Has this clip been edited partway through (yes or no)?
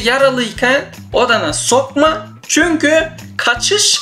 no